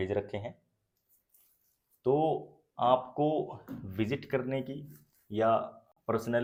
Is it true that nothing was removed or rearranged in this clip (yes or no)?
yes